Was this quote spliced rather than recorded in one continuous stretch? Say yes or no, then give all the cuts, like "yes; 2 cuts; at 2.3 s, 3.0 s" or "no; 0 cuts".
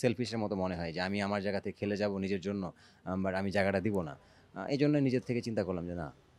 no; 0 cuts